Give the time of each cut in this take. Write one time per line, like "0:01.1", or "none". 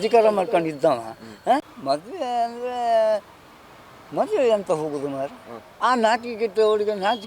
0:01.7